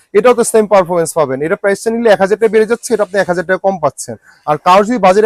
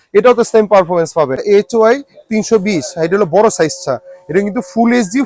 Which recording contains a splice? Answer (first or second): second